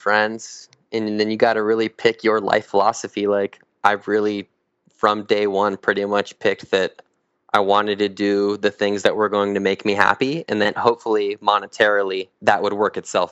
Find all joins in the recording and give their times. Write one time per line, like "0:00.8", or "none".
0:12.3